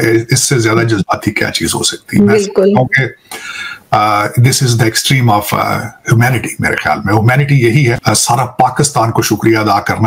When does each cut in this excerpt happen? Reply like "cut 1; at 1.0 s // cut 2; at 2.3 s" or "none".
cut 1; at 8.0 s

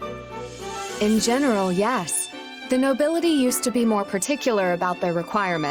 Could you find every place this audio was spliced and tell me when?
cut 1; at 1.0 s

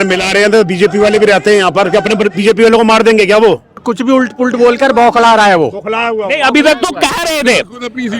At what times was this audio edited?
cut 1; at 3.8 s

